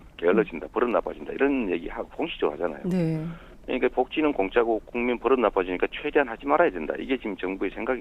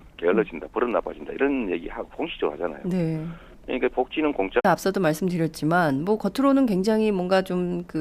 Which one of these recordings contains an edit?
first; 1 cut; at 4.6 s

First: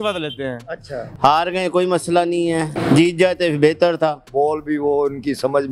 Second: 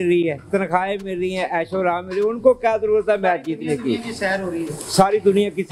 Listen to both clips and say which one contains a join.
first; 2 cuts; at 1.1 s, 4.3 s

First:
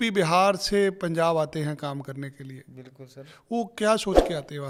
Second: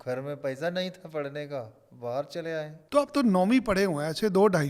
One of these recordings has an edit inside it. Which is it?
second; 1 cut; at 2.8 s

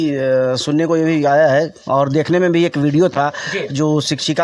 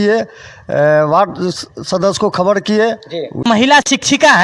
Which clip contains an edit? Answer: second; 1 cut; at 3.4 s

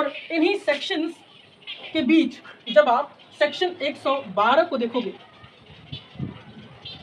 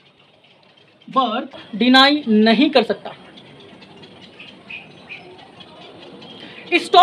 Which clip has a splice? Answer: second; 1 cut; at 1.7 s

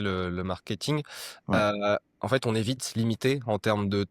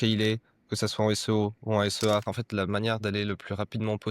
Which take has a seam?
second; 1 cut; at 2.4 s

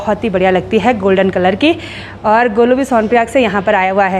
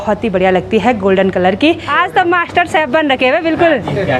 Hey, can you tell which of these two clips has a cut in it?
second; 1 cut; at 1.9 s

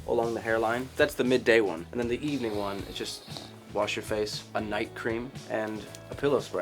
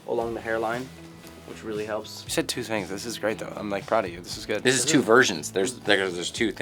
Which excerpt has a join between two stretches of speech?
first; 4 cuts; at 0.9 s, 1.8 s, 4.4 s, 5.5 s

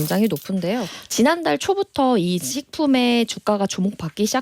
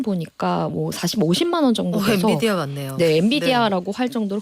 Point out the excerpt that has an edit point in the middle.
first; 1 cut; at 1.0 s

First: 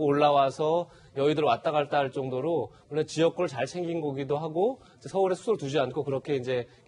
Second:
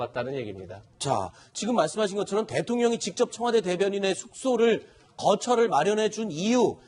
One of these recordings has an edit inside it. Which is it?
second; 1 cut; at 5.0 s

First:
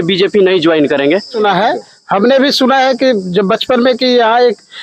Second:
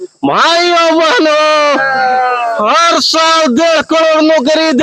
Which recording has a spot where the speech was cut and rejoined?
first; 1 cut; at 1.3 s

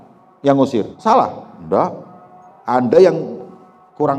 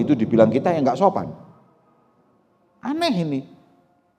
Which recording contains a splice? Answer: first; 1 cut; at 0.9 s

